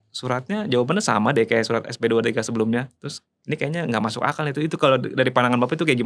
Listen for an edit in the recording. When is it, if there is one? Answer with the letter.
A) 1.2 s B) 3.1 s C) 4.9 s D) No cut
D